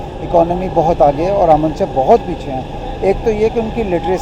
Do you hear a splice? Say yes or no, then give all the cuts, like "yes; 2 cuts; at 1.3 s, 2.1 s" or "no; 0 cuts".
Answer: no; 0 cuts